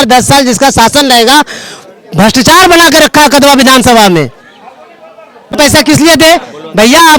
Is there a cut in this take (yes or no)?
yes